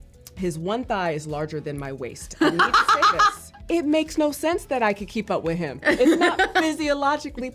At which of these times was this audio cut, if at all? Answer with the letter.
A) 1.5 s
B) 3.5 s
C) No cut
B